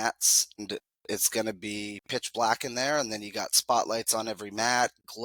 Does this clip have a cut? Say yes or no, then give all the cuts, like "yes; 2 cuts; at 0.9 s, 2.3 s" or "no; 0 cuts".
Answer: no; 0 cuts